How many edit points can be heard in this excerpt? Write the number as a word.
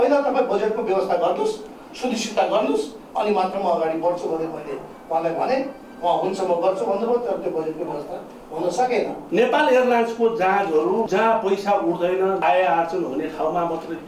three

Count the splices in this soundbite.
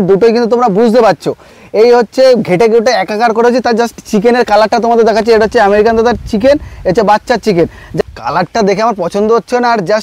one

